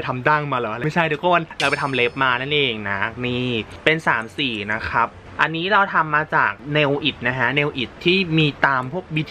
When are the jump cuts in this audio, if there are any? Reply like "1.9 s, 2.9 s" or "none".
none